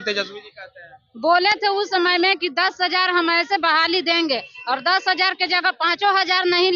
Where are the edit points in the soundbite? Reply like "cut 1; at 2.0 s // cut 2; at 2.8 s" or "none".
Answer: none